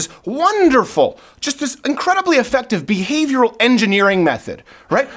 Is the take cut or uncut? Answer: uncut